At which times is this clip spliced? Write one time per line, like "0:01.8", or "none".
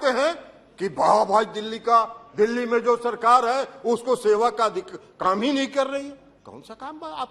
none